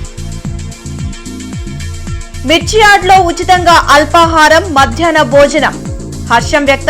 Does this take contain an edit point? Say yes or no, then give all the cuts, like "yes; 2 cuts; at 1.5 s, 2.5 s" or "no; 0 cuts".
no; 0 cuts